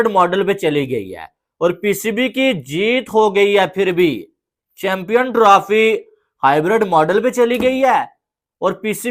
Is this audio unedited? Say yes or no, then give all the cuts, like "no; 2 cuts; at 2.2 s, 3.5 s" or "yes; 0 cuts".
yes; 0 cuts